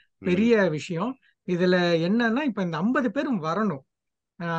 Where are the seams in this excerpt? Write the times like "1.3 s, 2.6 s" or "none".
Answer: none